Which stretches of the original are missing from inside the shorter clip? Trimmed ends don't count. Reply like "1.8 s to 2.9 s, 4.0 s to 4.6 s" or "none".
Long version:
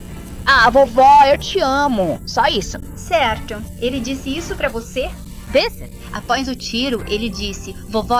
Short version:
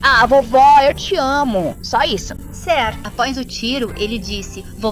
3.5 s to 6.1 s